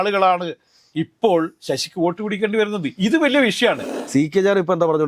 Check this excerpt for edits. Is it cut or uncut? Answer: cut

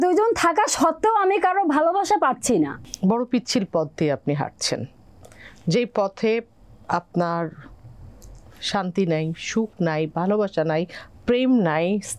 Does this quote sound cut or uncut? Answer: uncut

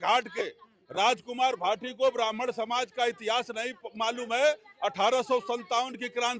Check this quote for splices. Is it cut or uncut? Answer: uncut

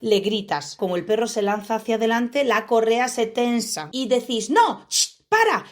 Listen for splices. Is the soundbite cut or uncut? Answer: cut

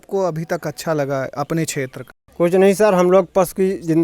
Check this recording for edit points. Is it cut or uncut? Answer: cut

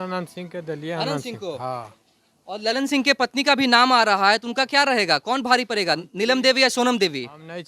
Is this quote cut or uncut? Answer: uncut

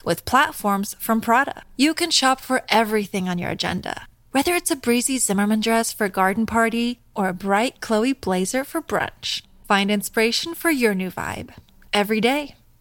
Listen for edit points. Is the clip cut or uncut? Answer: uncut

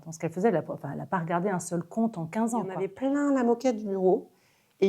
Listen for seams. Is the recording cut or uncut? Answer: cut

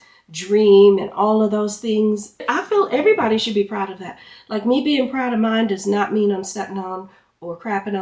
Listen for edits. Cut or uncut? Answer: cut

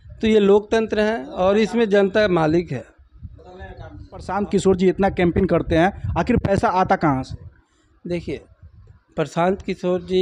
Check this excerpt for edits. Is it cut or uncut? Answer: cut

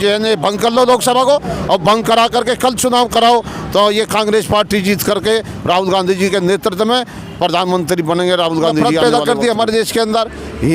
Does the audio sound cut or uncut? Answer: cut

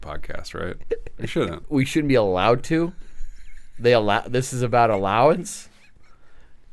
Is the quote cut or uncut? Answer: cut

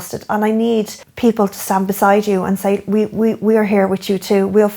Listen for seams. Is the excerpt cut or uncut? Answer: cut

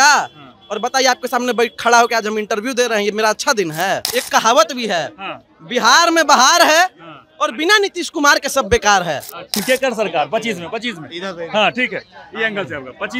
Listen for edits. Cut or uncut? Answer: cut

